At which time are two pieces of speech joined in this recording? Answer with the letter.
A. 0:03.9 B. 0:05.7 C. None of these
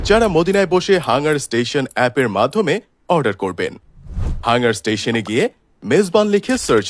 A